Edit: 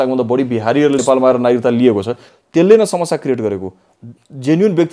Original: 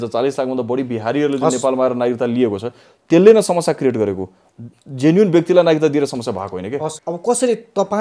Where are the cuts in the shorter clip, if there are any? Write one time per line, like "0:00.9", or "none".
0:01.0